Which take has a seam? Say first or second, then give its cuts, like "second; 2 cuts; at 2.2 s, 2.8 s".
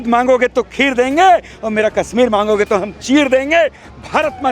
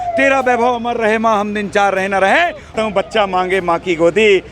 second; 1 cut; at 2.7 s